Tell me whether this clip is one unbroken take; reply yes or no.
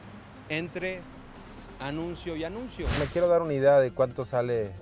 no